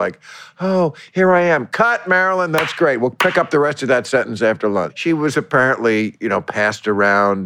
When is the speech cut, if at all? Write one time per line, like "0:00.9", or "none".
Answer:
0:04.9